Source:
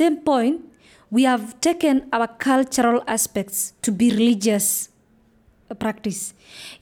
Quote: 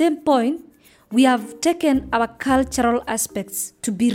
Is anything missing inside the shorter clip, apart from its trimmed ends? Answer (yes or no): no